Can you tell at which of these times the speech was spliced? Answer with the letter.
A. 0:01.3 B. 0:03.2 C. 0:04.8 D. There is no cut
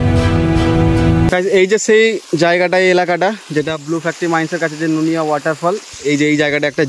A